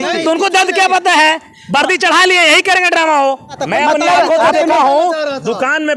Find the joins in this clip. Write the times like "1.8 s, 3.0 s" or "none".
3.6 s

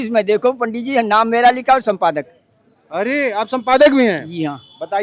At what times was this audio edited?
none

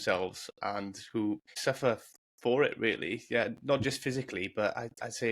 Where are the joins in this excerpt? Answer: 1.6 s

